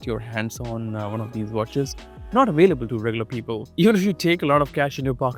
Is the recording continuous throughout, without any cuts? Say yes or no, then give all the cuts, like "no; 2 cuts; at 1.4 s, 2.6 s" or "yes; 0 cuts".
yes; 0 cuts